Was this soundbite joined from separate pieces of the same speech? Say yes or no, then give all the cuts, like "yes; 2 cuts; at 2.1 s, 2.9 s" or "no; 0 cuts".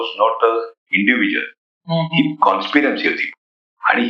no; 0 cuts